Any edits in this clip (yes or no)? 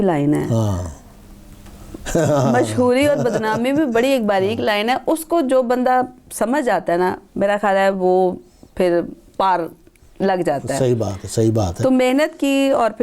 no